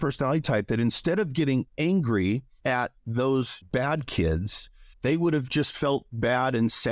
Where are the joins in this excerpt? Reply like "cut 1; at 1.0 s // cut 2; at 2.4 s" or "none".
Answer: cut 1; at 2.5 s // cut 2; at 3.6 s